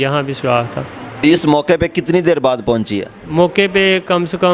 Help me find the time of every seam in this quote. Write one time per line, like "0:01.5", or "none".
0:01.2